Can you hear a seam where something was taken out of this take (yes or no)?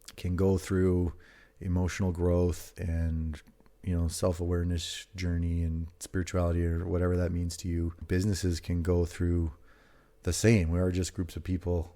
yes